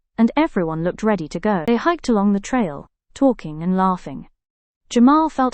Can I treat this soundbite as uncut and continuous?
no; 1 cut; at 1.6 s

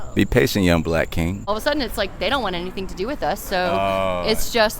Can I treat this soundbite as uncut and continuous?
no; 1 cut; at 1.5 s

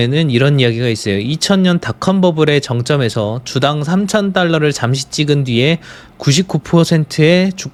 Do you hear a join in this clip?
no; 0 cuts

